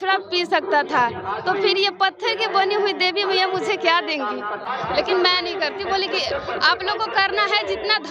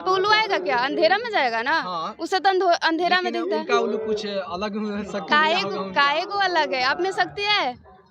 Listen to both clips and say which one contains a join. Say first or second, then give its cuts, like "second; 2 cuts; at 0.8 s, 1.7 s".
first; 1 cut; at 4.7 s